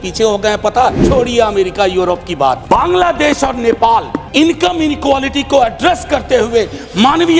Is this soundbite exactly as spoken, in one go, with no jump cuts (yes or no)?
no